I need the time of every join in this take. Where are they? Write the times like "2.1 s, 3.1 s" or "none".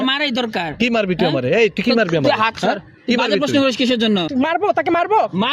4.3 s